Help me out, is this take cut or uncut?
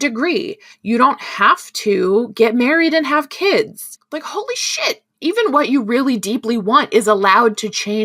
cut